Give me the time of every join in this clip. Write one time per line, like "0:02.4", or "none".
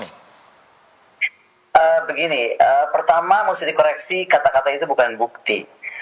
none